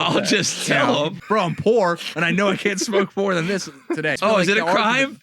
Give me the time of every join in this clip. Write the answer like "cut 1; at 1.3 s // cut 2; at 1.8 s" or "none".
cut 1; at 1.2 s // cut 2; at 4.2 s